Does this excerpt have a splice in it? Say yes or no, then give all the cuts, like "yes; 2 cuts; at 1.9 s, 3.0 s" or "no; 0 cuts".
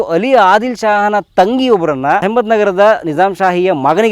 yes; 1 cut; at 2.2 s